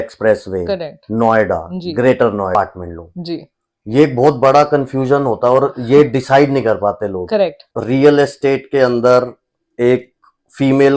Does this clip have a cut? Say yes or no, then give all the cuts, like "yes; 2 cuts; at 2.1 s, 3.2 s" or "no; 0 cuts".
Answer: yes; 2 cuts; at 2.6 s, 7.7 s